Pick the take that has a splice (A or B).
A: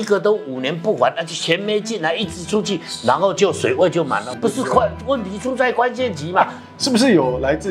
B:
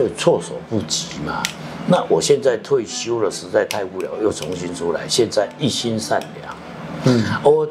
A